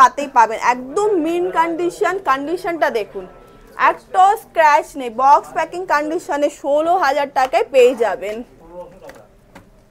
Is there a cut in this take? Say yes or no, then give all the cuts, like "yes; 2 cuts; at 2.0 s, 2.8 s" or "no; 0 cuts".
no; 0 cuts